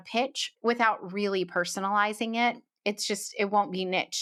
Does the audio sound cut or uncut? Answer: uncut